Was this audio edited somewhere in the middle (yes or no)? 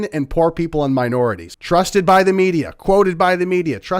yes